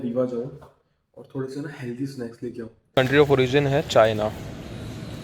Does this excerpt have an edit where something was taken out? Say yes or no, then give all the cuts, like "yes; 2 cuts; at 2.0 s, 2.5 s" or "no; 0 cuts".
yes; 1 cut; at 2.9 s